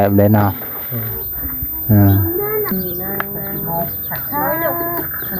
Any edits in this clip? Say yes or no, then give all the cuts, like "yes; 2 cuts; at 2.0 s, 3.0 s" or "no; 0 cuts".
yes; 1 cut; at 2.7 s